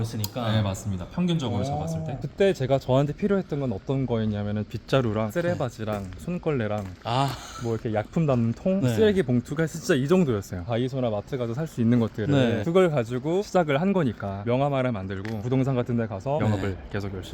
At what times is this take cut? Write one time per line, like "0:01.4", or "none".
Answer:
0:02.2
0:10.5
0:14.4
0:16.4